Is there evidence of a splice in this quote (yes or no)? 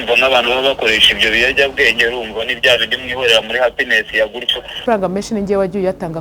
yes